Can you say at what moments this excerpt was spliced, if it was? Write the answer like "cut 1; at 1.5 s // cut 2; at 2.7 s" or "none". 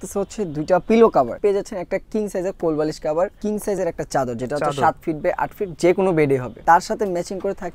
cut 1; at 1.4 s // cut 2; at 3.4 s // cut 3; at 6.5 s